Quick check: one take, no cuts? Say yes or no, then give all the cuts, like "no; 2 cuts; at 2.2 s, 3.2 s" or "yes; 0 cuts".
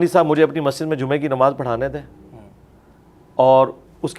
yes; 0 cuts